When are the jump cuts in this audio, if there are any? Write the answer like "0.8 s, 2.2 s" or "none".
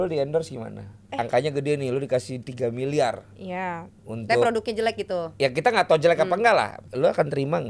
1.0 s, 6.8 s